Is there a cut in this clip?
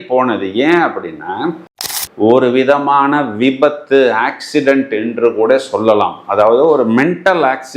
yes; 1 cut; at 1.9 s

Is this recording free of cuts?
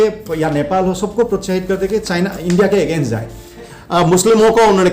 no; 1 cut; at 3.7 s

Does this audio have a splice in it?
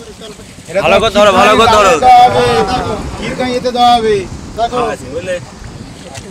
no; 0 cuts

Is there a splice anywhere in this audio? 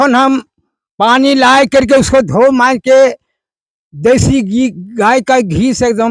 no; 0 cuts

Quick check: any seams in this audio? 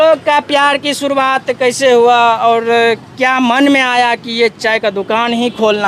no; 0 cuts

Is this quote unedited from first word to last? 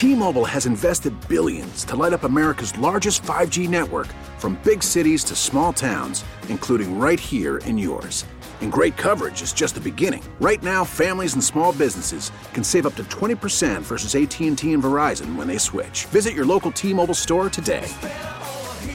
yes; 0 cuts

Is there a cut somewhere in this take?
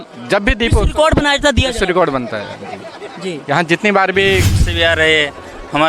yes; 1 cut; at 4.6 s

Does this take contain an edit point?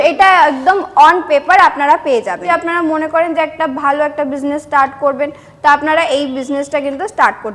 yes; 1 cut; at 2.4 s

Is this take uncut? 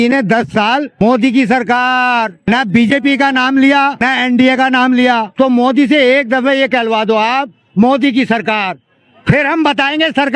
no; 4 cuts; at 1.0 s, 2.4 s, 4.1 s, 5.3 s

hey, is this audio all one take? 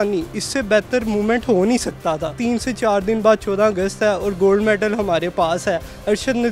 no; 1 cut; at 2.3 s

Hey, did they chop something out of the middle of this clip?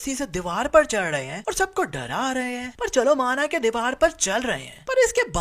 no; 0 cuts

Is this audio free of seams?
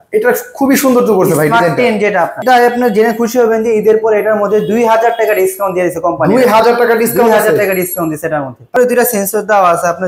no; 2 cuts; at 2.4 s, 8.8 s

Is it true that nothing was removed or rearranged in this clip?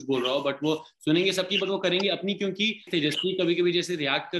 no; 1 cut; at 2.9 s

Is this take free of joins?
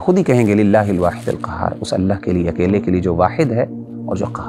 yes; 0 cuts

